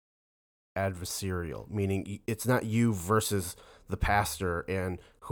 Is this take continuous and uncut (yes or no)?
yes